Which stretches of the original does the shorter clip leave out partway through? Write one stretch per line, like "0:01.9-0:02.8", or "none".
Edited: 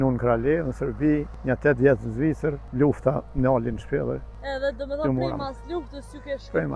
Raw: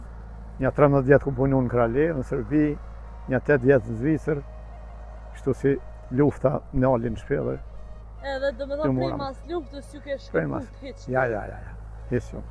0:02.8-0:03.2
0:04.5-0:06.0
0:07.7-0:08.1